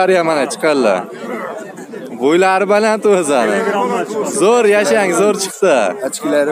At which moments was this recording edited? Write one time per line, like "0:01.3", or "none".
none